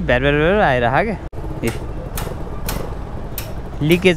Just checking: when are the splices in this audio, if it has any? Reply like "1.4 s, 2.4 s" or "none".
1.3 s